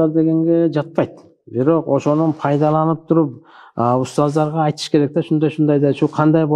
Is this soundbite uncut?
yes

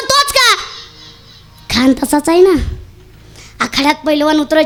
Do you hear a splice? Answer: no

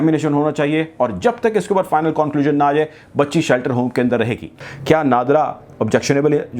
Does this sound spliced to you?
yes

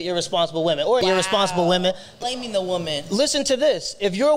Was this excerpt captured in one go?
no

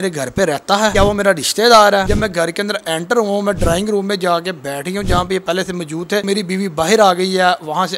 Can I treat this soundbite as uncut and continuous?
no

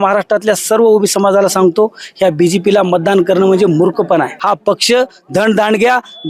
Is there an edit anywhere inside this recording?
yes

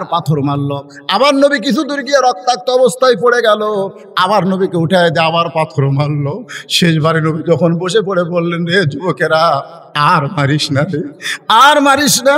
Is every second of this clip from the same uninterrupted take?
yes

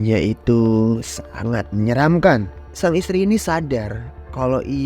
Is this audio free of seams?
no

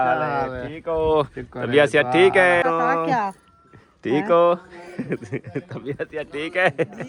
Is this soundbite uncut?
no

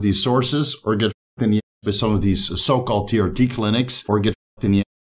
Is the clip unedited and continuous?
no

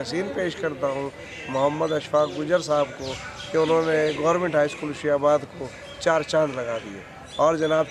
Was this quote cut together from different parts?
no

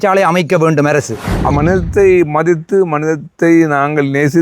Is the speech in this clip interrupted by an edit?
yes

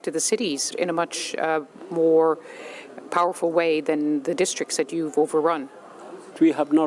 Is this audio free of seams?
yes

